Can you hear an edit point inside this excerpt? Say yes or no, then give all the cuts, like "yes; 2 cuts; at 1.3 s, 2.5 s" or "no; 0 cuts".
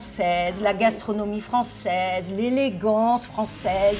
no; 0 cuts